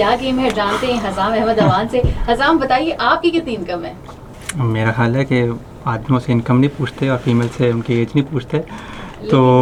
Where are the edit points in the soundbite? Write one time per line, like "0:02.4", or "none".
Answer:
none